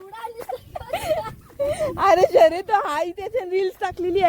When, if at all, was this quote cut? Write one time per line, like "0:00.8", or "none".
none